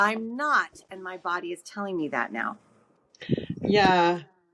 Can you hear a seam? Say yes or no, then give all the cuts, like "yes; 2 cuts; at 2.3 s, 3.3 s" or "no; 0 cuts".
no; 0 cuts